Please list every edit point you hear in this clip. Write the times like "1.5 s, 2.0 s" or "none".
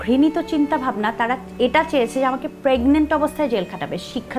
none